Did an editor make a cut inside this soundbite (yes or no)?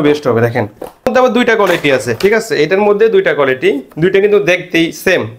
yes